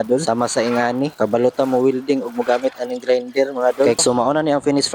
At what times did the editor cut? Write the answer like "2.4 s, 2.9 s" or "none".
4.0 s